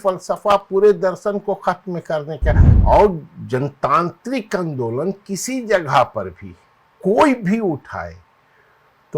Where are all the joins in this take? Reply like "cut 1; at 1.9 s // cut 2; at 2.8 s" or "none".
cut 1; at 2.7 s